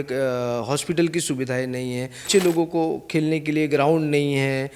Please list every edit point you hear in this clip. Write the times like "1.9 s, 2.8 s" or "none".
2.3 s

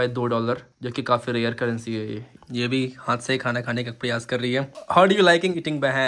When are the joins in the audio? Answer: 2.3 s, 4.8 s

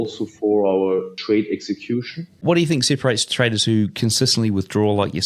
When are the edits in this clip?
1.1 s, 2.4 s

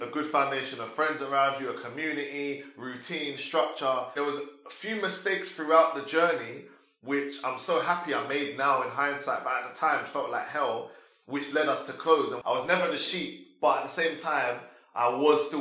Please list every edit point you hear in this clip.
4.1 s, 12.4 s

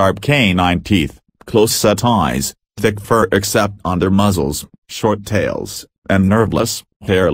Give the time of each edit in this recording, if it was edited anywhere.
6.1 s

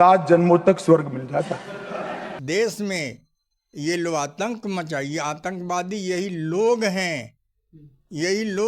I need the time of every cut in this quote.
2.3 s

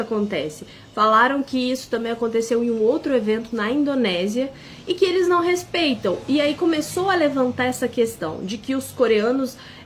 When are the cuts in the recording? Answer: none

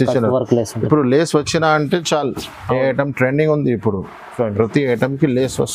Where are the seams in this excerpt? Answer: none

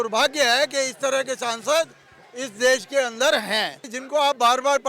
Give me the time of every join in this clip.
3.9 s

